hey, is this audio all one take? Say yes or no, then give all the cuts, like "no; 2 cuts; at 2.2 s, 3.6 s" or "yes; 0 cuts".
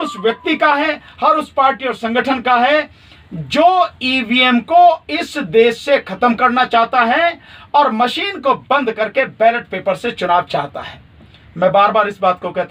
yes; 0 cuts